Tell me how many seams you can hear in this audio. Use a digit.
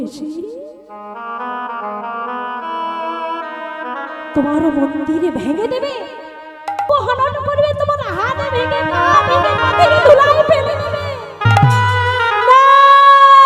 1